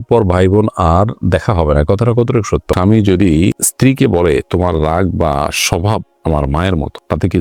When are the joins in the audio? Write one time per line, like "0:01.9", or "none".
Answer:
0:02.7